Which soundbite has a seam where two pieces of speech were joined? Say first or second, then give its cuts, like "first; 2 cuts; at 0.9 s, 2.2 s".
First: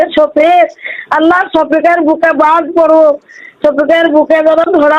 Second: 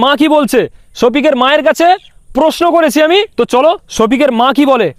second; 1 cut; at 3.3 s